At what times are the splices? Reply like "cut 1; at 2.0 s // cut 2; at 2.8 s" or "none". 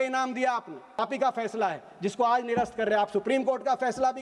cut 1; at 1.0 s